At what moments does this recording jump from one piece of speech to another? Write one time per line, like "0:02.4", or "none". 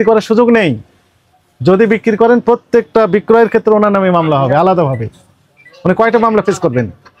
none